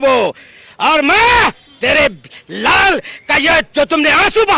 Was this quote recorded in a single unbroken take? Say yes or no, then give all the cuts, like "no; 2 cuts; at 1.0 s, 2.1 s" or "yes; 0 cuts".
yes; 0 cuts